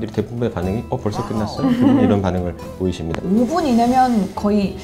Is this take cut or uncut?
cut